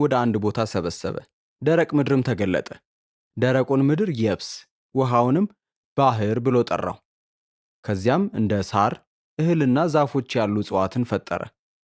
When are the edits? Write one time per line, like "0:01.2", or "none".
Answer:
none